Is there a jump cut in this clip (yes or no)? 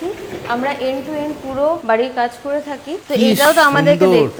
no